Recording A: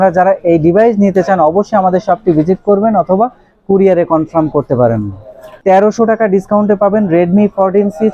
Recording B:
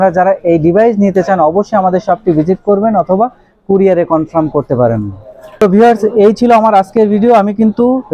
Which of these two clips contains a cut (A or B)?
A